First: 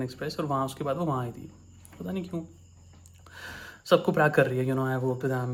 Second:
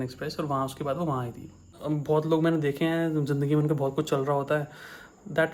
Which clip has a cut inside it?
second; 1 cut; at 1.7 s

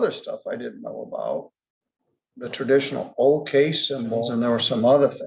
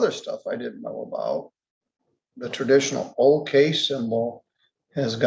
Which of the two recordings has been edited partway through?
first; 1 cut; at 4.3 s

